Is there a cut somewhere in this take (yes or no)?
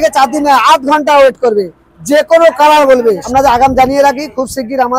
yes